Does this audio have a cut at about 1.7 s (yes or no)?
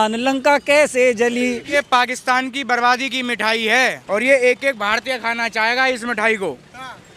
yes